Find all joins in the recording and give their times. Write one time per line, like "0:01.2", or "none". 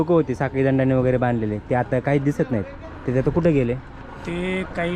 none